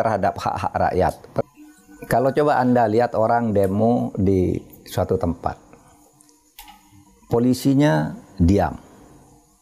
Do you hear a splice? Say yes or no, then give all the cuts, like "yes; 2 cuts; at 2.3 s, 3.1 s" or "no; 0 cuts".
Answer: yes; 1 cut; at 1.4 s